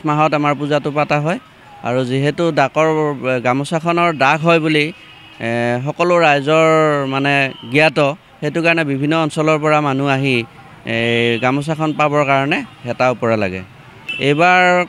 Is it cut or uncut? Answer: uncut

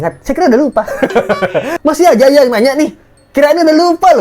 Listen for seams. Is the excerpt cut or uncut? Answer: cut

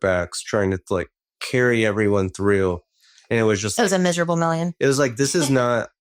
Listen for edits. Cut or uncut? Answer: uncut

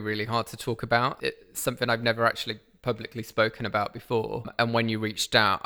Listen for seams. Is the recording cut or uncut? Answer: cut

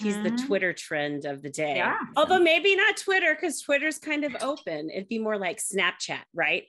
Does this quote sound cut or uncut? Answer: cut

